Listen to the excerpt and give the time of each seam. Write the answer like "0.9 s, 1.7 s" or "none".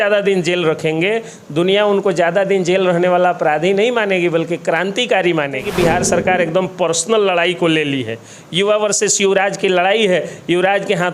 5.7 s